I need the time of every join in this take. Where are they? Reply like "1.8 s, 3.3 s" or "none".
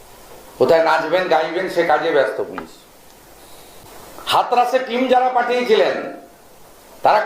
3.8 s